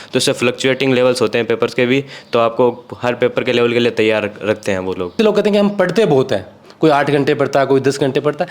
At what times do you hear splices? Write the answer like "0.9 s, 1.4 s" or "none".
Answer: 5.1 s